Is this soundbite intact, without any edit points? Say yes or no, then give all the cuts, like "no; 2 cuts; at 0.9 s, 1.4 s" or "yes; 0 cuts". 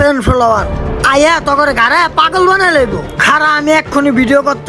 yes; 0 cuts